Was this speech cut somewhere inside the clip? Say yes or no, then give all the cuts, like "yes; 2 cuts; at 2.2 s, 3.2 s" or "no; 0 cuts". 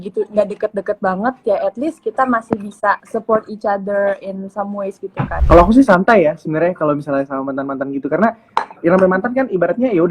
yes; 2 cuts; at 3.0 s, 5.4 s